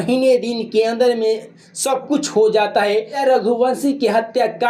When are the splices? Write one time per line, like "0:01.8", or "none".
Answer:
0:03.2